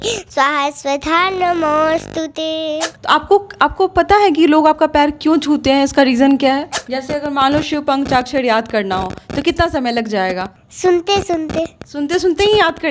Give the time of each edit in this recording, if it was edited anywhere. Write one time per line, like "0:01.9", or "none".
0:02.9
0:06.8
0:10.6